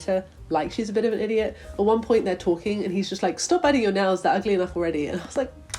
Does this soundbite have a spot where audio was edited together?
no; 0 cuts

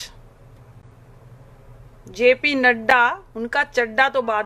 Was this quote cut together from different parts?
no; 0 cuts

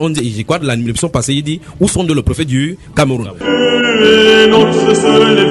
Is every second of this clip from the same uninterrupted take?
no; 1 cut; at 3.3 s

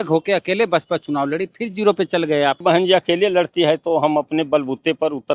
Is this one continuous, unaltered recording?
no; 1 cut; at 2.6 s

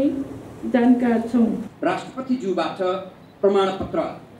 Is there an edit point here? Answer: yes; 1 cut; at 1.7 s

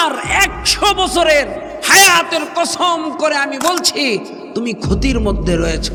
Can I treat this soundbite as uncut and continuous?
yes; 0 cuts

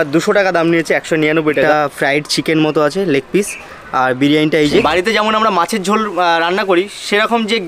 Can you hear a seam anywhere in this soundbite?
yes; 2 cuts; at 1.7 s, 4.8 s

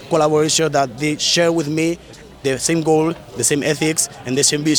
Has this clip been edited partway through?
no; 0 cuts

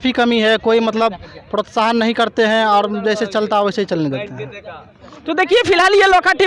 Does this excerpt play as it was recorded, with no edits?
yes; 0 cuts

